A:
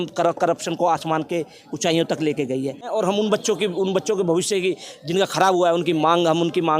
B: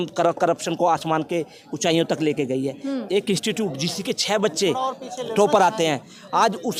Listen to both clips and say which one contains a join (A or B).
A